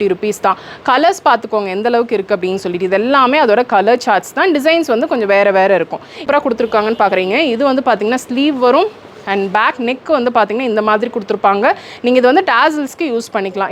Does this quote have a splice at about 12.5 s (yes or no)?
no